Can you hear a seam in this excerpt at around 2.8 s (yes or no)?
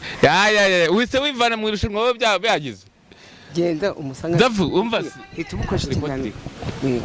no